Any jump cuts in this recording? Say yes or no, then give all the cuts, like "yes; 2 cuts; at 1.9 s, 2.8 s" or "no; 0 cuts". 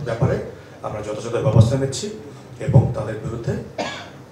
no; 0 cuts